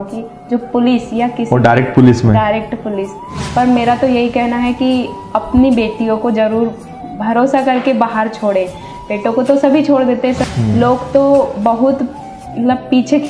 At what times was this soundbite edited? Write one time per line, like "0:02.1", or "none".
0:03.4
0:10.4